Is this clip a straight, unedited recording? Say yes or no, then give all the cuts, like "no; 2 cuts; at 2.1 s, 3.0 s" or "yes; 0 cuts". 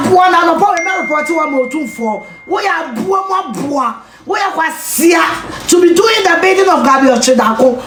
yes; 0 cuts